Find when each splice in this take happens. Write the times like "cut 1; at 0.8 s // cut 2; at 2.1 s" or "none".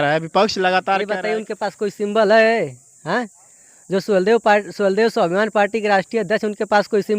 cut 1; at 1.1 s